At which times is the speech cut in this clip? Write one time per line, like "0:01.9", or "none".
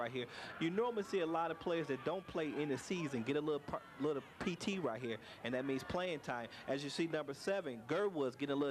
0:01.7